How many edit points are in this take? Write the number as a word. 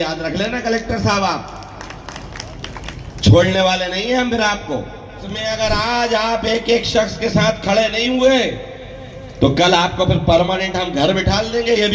one